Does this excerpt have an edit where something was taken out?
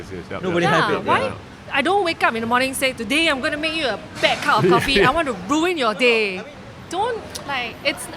yes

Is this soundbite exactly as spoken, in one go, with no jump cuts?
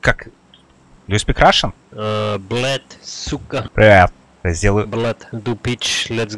no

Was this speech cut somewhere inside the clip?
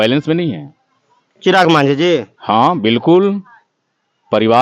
no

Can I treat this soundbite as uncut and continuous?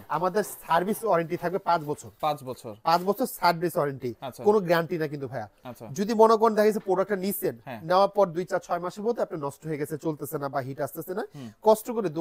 yes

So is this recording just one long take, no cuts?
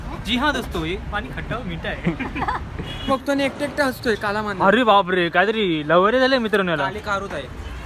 no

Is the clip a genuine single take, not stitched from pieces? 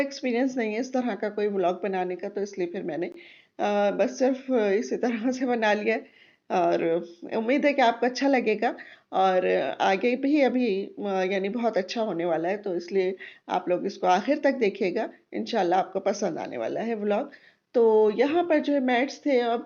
yes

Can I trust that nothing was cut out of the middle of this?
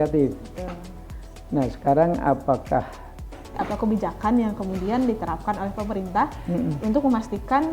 no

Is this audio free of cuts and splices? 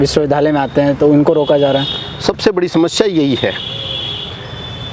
yes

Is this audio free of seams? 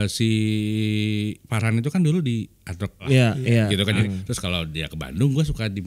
no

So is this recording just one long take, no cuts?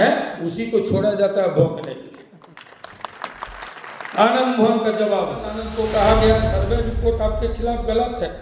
no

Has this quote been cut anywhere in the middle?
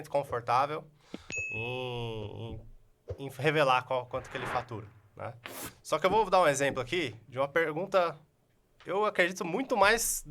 no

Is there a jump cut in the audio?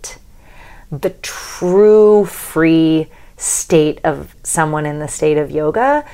yes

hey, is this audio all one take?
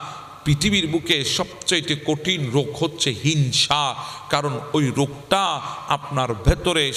yes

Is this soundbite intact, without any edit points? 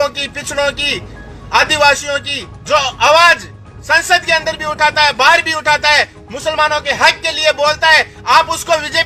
yes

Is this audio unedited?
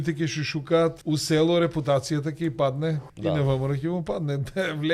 no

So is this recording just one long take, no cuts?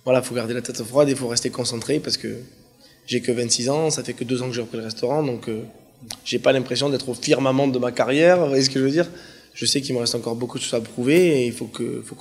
no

